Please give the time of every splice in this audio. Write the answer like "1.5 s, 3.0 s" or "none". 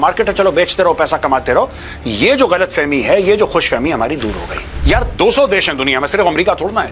4.8 s